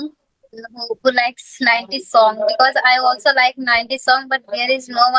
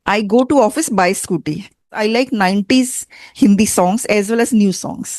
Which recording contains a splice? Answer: second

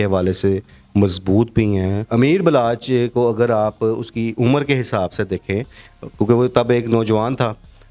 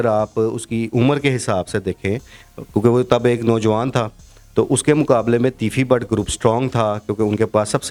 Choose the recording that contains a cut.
first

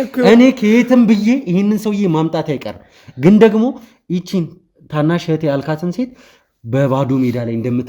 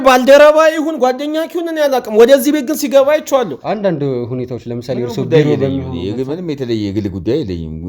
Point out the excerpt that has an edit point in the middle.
second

